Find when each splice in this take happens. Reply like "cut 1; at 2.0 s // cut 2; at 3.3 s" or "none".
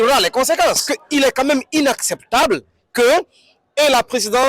cut 1; at 0.9 s